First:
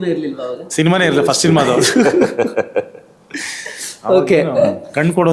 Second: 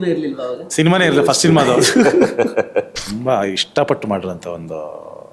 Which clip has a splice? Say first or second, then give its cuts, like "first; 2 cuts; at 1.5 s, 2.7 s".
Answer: second; 1 cut; at 3.0 s